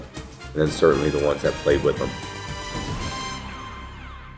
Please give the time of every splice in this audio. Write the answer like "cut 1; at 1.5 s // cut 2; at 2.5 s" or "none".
cut 1; at 2.2 s